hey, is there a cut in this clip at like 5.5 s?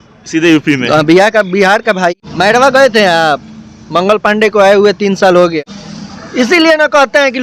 yes; 2 cuts; at 2.1 s, 5.5 s

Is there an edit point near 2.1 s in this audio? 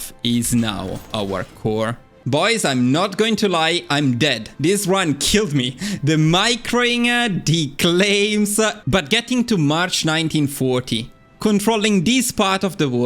yes; 1 cut; at 2.1 s

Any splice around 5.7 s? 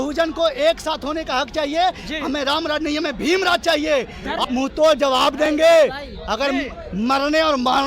no; 1 cut; at 4.4 s

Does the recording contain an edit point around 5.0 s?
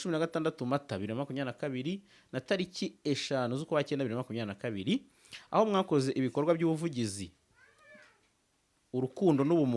no; 0 cuts

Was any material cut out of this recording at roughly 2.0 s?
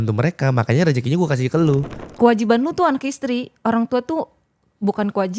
yes; 1 cut; at 2.0 s

